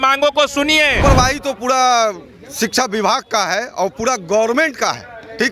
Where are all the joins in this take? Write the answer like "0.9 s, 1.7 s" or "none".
1.0 s